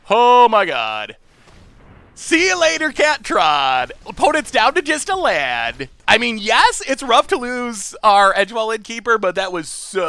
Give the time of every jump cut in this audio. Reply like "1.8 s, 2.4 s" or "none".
4.0 s, 6.0 s